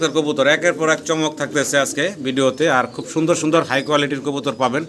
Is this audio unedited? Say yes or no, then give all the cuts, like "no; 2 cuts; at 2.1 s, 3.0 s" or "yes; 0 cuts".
yes; 0 cuts